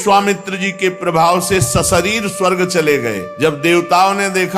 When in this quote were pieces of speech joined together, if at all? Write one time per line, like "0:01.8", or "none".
0:03.3